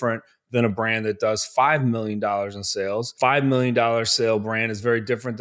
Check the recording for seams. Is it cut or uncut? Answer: cut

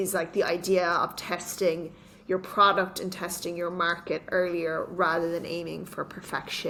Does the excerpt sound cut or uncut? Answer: uncut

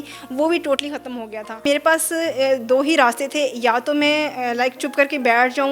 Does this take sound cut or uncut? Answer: cut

